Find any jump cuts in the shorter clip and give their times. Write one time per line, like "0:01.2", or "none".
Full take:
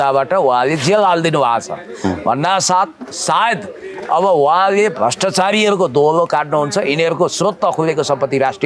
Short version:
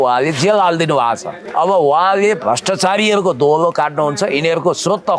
0:01.4